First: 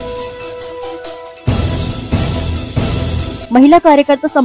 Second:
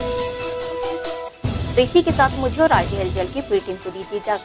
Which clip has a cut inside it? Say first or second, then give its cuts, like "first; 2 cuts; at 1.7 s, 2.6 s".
first; 1 cut; at 1.2 s